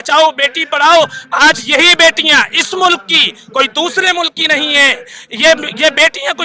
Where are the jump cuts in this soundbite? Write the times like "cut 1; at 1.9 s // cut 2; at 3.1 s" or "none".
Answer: none